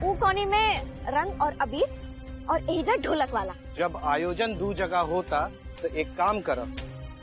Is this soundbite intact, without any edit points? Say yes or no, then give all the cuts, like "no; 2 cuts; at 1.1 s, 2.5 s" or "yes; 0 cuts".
no; 2 cuts; at 0.9 s, 3.6 s